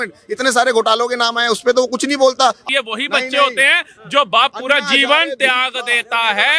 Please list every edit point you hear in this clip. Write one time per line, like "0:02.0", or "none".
0:02.6